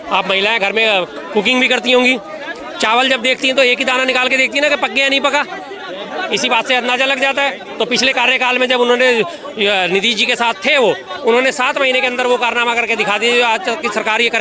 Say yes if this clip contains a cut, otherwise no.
no